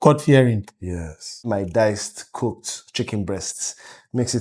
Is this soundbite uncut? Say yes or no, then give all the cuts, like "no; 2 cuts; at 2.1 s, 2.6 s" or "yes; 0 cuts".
no; 1 cut; at 1.4 s